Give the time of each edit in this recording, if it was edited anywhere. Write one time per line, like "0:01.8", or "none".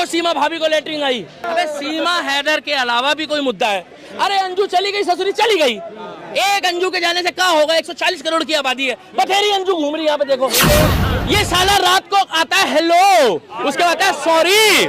0:01.5
0:11.0